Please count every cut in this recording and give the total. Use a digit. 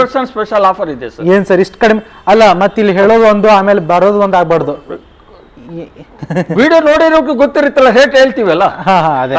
0